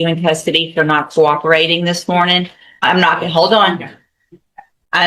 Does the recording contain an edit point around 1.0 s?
no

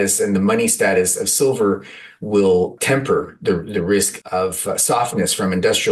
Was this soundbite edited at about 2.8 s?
yes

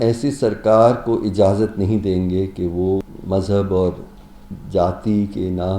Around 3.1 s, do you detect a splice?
yes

